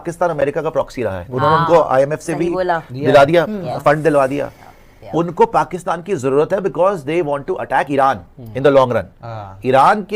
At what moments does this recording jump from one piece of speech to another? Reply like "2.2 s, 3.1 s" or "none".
none

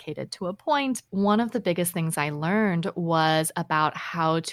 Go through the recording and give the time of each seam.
1.0 s

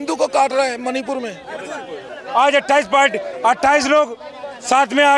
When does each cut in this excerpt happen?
2.1 s

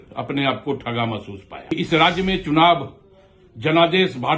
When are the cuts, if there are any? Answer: 1.7 s

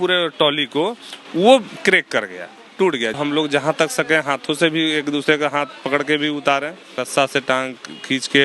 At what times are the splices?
3.2 s, 7.0 s

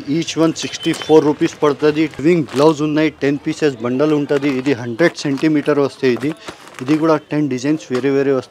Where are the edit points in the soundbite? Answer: 2.1 s

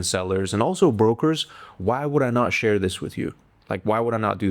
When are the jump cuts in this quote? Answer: none

